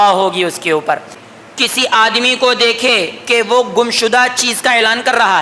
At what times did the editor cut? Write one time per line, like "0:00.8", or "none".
0:01.2